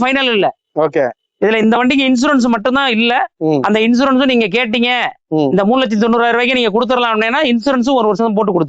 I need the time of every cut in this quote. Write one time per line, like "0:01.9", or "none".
none